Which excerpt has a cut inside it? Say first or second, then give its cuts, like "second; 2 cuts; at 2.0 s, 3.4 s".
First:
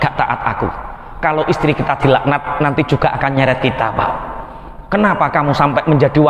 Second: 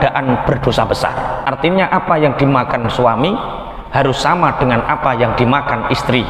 second; 1 cut; at 1.4 s